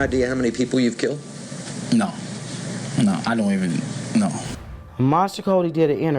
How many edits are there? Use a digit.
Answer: 1